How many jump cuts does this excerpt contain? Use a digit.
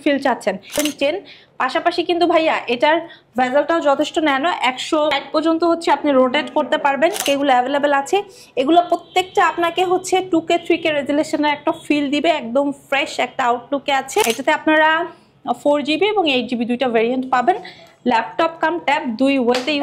4